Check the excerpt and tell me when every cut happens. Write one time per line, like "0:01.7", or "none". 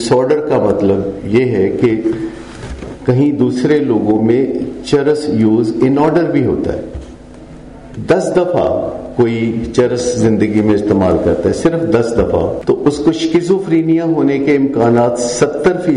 0:07.9
0:12.6